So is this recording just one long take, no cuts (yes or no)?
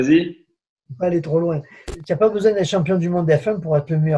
no